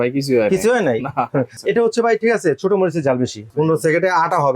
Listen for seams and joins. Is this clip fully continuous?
no; 2 cuts; at 1.6 s, 3.4 s

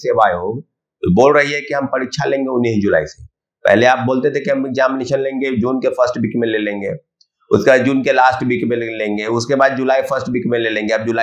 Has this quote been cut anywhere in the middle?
no; 0 cuts

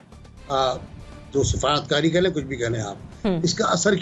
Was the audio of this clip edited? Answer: no; 0 cuts

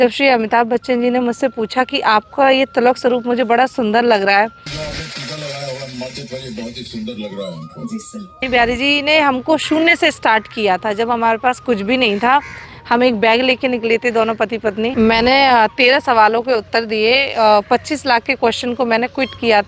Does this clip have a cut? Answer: yes; 3 cuts; at 4.7 s, 8.4 s, 14.9 s

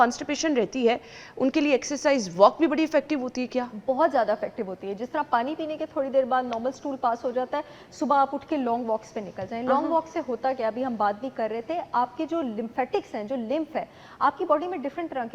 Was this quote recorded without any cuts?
yes; 0 cuts

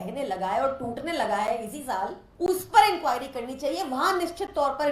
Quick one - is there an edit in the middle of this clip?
yes; 1 cut; at 2.2 s

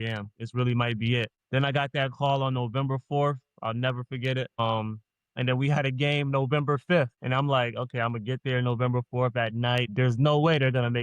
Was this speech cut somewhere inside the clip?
yes; 4 cuts; at 1.4 s, 4.5 s, 7.2 s, 9.9 s

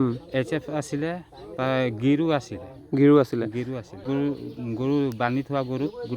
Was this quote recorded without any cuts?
no; 1 cut; at 3.9 s

